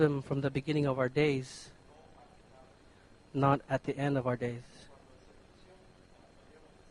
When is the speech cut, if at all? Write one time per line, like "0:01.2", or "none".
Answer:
0:04.0